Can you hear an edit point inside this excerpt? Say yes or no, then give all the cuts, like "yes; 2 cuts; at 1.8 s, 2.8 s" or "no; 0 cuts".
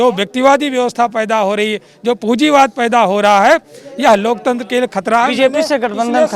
no; 0 cuts